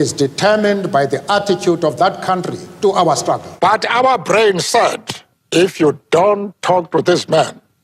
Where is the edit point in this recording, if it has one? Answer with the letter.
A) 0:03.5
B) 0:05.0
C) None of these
A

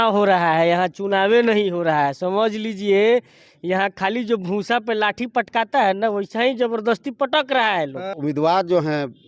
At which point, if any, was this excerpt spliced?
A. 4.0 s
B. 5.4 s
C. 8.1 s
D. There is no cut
C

